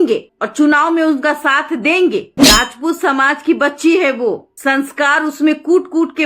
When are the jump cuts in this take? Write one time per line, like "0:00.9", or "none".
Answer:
0:02.3